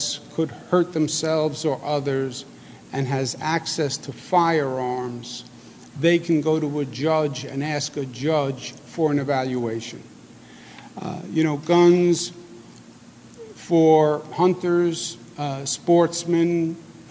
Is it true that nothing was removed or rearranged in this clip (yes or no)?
yes